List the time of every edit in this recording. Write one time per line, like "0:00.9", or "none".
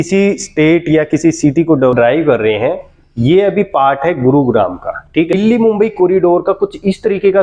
0:01.9
0:05.3